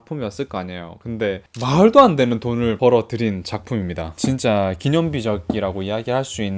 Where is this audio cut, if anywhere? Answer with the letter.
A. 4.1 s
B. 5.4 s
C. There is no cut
C